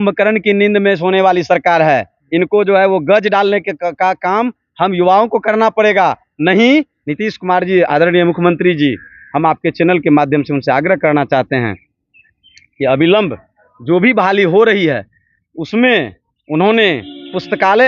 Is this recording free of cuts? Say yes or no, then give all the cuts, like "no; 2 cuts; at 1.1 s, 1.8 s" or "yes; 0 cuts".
no; 1 cut; at 7.0 s